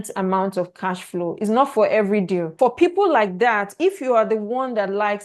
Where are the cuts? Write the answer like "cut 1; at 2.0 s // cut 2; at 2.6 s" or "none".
cut 1; at 2.5 s